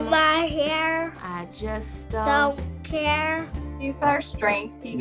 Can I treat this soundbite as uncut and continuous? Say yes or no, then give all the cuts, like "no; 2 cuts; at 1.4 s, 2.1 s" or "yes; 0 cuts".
no; 1 cut; at 3.8 s